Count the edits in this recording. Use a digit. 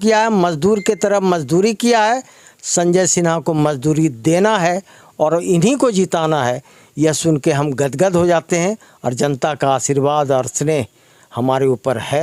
0